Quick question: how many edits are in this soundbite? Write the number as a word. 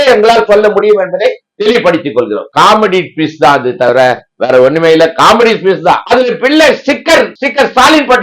two